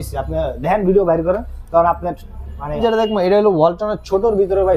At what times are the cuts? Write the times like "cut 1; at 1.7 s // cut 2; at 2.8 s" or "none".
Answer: cut 1; at 2.8 s